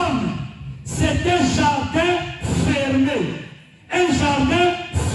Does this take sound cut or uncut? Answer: uncut